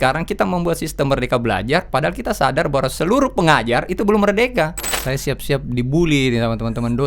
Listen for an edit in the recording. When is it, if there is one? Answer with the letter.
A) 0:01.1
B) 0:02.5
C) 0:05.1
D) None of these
C